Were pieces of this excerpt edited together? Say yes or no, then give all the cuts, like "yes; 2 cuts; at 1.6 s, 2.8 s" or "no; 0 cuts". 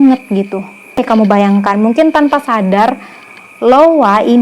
yes; 1 cut; at 1.0 s